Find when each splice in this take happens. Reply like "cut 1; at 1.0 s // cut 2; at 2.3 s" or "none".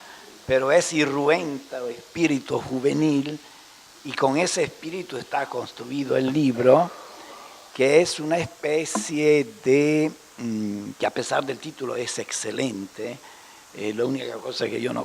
cut 1; at 5.7 s